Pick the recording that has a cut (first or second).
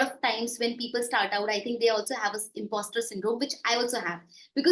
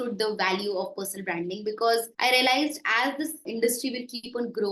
second